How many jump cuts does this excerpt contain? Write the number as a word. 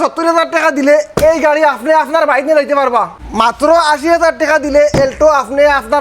one